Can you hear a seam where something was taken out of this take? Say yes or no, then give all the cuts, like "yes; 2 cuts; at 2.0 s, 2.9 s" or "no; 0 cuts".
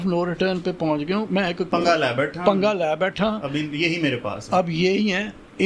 yes; 1 cut; at 1.7 s